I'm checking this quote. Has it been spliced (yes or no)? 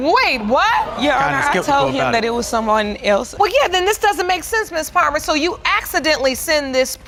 no